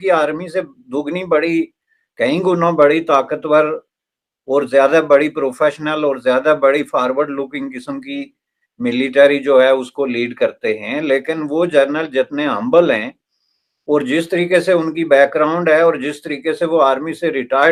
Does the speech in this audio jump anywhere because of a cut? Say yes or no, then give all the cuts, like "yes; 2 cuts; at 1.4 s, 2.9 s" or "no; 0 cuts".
no; 0 cuts